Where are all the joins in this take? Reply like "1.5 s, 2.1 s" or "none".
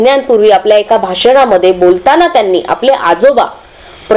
none